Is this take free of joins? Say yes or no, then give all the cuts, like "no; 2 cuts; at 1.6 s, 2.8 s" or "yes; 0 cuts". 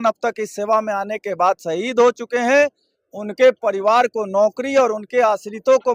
yes; 0 cuts